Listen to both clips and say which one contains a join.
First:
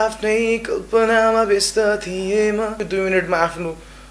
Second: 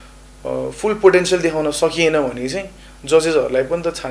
first; 1 cut; at 2.8 s

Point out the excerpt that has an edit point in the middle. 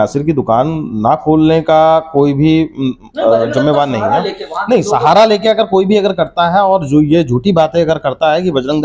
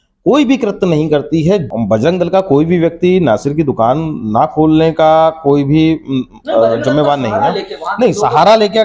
second; 1 cut; at 1.7 s

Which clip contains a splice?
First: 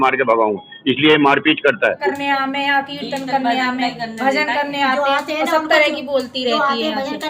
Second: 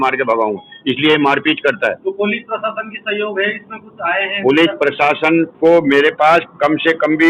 first; 1 cut; at 2.1 s

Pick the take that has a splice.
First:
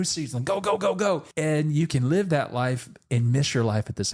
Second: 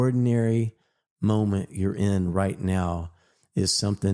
first; 1 cut; at 1.3 s

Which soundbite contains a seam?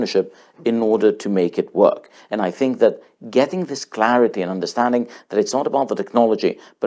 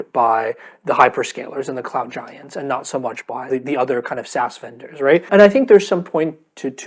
second; 2 cuts; at 3.4 s, 5.3 s

